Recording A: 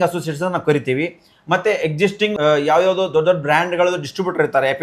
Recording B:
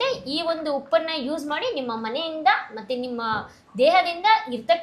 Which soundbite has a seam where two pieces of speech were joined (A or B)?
A